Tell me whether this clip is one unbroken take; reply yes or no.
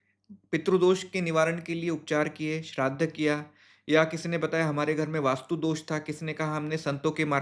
yes